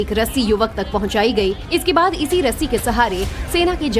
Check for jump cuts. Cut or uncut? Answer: uncut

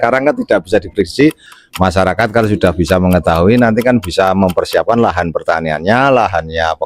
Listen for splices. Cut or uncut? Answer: cut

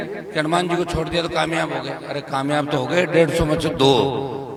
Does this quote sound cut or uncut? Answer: uncut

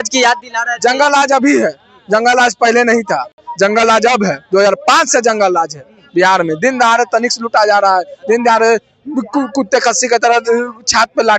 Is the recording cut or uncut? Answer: uncut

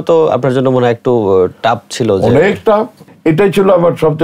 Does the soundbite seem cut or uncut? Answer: cut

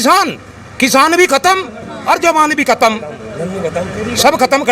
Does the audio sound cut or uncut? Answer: uncut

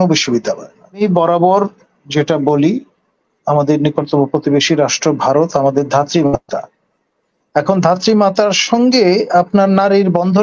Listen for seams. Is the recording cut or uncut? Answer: cut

